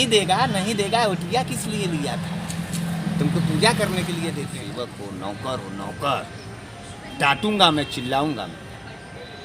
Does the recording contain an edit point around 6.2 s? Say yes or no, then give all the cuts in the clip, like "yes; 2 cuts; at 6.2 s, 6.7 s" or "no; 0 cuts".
no; 1 cut; at 4.5 s